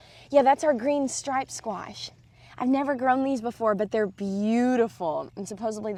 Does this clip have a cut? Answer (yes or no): no